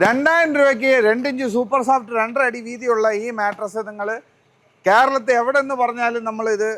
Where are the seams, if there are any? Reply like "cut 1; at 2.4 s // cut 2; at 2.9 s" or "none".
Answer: none